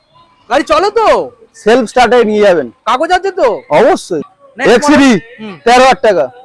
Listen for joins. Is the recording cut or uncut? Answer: cut